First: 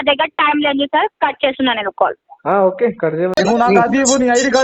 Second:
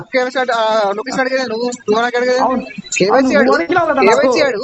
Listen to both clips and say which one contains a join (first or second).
first